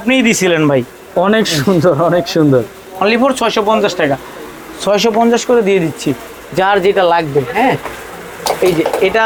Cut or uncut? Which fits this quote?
uncut